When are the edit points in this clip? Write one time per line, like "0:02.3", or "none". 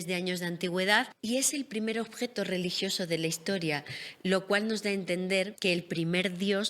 0:01.1
0:05.5